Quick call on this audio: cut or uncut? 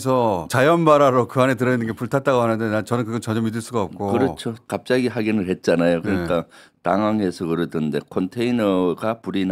uncut